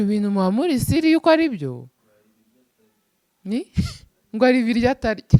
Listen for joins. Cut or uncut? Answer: uncut